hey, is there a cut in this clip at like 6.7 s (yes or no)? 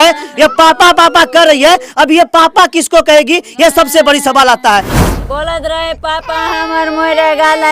no